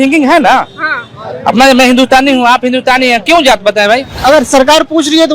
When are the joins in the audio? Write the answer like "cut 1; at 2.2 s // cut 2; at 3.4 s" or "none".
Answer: cut 1; at 4.1 s